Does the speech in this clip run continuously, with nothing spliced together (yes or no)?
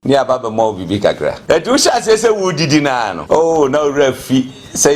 no